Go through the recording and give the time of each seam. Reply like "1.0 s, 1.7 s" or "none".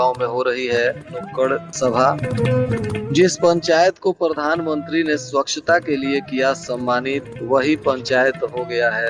none